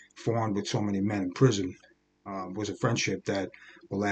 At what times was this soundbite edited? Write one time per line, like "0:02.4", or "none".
none